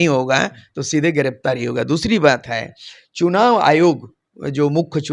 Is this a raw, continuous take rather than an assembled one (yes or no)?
yes